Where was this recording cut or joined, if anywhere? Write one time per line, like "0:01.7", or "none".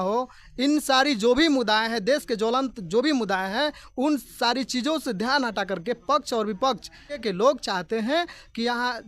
0:07.2